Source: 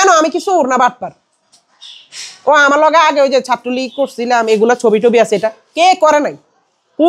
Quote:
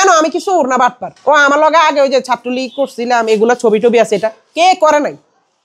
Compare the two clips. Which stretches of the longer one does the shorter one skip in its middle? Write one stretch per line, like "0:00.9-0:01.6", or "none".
0:01.1-0:02.3